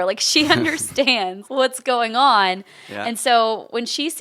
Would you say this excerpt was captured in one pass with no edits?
no; 1 cut; at 1.4 s

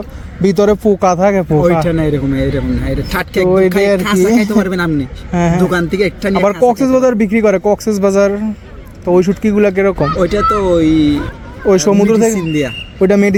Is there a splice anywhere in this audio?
no; 0 cuts

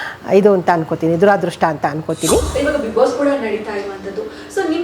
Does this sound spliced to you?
yes; 1 cut; at 2.5 s

